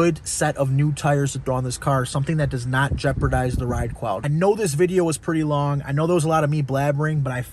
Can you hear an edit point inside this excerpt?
yes; 1 cut; at 4.2 s

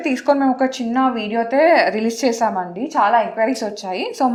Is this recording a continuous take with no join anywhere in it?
yes; 0 cuts

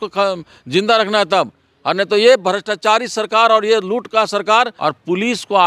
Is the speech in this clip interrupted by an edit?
yes; 1 cut; at 4.7 s

